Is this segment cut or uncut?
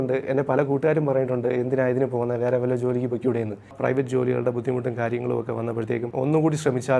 cut